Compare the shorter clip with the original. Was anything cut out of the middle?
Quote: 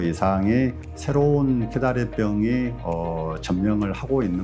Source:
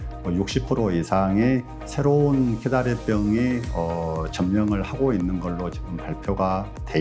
no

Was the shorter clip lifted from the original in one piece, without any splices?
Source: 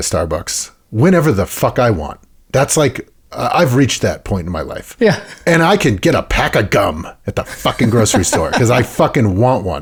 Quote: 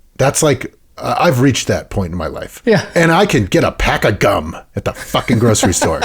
no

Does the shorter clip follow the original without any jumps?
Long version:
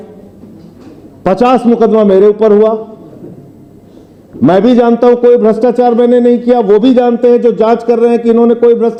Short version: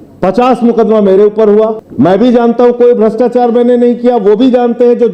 no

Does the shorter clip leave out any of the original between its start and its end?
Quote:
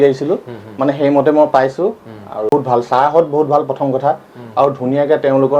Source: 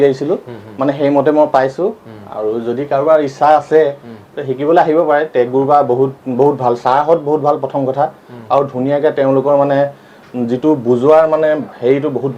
yes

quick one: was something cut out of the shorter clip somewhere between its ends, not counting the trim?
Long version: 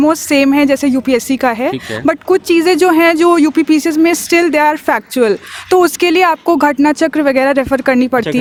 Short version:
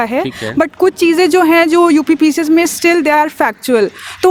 no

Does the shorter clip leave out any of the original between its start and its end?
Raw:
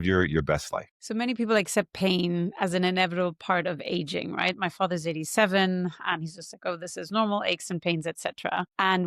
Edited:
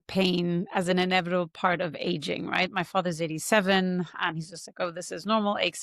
no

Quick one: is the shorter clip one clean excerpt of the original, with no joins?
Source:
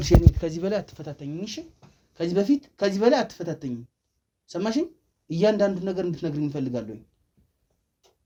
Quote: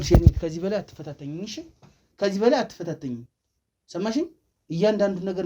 no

